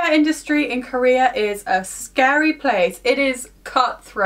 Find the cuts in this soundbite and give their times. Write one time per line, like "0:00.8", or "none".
none